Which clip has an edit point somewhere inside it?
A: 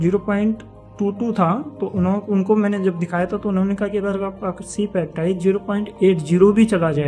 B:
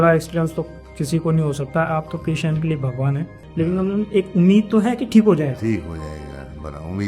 B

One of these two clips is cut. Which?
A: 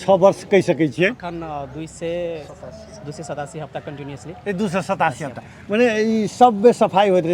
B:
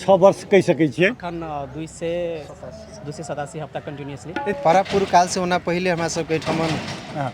B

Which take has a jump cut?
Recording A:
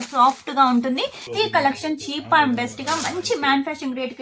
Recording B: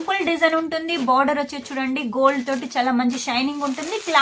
A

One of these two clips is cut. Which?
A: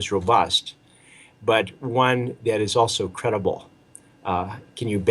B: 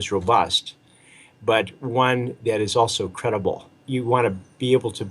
B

